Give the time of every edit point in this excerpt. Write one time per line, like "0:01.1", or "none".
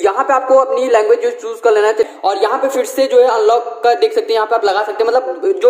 0:02.1